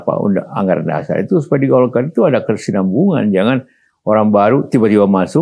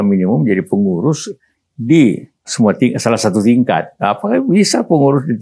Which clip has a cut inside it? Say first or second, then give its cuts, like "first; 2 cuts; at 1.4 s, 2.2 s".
second; 1 cut; at 2.5 s